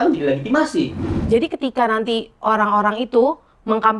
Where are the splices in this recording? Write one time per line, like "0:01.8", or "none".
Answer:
0:01.2